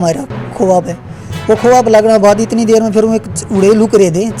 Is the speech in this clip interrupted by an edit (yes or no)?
no